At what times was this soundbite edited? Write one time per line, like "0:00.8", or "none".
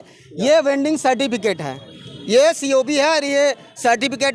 none